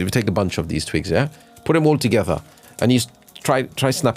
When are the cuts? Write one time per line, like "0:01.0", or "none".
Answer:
none